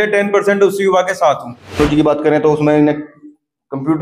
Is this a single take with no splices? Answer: no; 1 cut; at 1.8 s

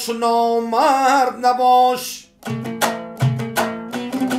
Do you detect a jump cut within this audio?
no; 0 cuts

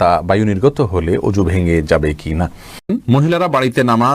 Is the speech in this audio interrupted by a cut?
yes; 1 cut; at 3.2 s

